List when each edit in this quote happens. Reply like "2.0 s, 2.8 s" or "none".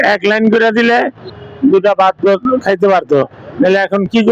1.3 s